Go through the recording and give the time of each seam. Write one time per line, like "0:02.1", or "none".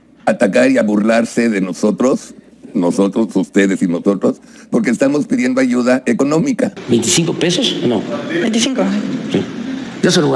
0:06.8